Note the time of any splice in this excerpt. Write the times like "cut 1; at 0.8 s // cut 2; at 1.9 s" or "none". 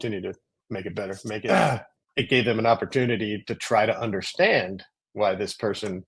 cut 1; at 1.4 s

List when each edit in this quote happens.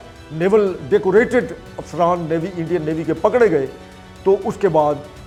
none

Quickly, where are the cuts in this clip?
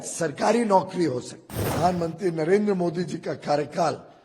cut 1; at 1.7 s

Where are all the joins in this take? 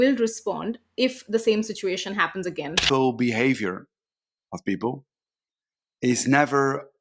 cut 1; at 2.8 s

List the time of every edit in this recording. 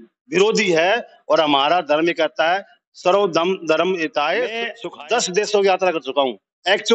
cut 1; at 4.7 s

